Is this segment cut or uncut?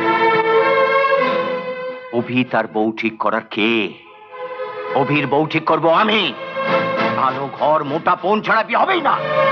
uncut